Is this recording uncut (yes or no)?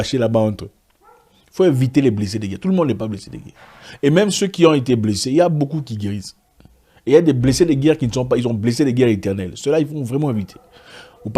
yes